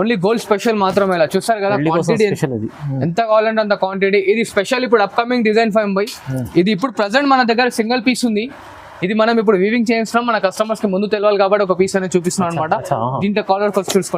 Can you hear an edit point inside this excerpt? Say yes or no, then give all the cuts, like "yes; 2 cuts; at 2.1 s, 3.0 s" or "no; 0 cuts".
no; 0 cuts